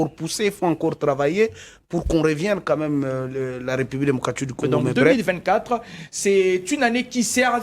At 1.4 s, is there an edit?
no; 1 cut; at 5.1 s

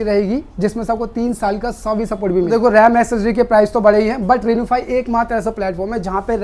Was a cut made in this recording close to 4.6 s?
no; 1 cut; at 2.5 s

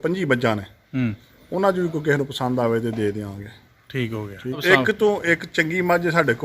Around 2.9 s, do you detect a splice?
no; 1 cut; at 4.6 s

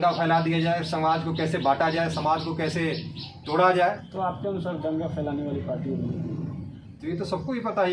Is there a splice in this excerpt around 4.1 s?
yes; 1 cut; at 4.1 s

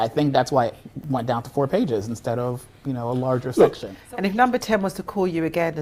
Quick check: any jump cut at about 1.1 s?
no; 1 cut; at 3.9 s

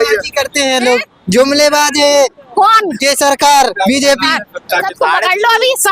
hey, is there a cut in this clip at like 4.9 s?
yes; 1 cut; at 4.9 s

